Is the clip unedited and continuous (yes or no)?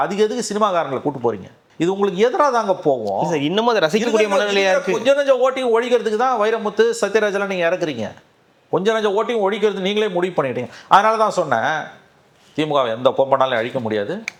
yes